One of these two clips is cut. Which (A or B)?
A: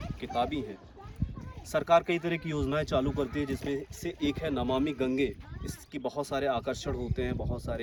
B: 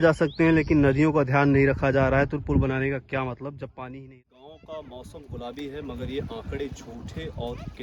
B